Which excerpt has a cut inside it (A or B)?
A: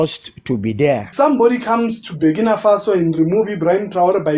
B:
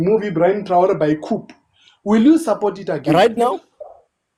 A